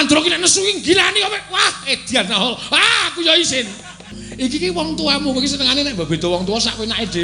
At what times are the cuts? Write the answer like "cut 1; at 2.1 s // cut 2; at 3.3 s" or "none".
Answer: cut 1; at 4.2 s